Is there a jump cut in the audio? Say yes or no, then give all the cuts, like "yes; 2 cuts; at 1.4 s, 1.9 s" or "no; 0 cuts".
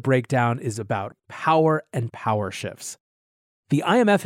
yes; 1 cut; at 1.1 s